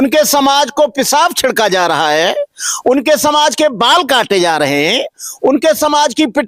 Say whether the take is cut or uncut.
uncut